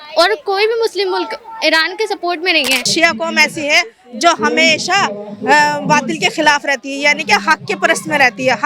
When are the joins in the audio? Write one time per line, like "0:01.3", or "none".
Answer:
0:02.9